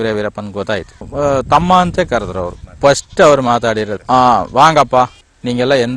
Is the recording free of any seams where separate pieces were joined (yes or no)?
no